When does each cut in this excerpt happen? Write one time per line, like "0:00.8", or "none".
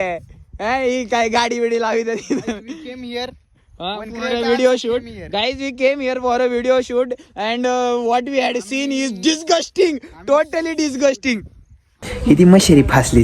0:12.1